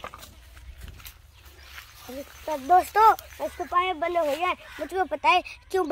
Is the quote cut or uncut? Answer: uncut